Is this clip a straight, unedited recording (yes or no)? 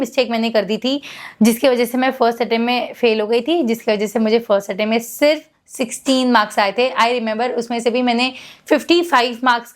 yes